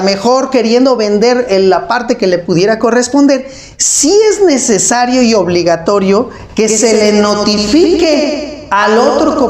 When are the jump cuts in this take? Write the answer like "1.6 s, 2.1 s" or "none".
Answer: none